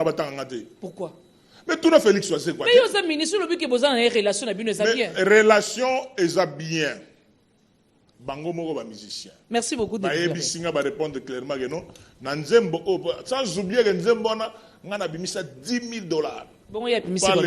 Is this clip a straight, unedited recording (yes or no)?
yes